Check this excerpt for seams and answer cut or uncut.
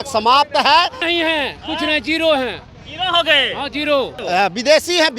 cut